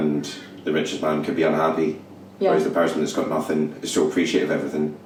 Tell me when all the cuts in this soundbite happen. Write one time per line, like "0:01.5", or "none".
none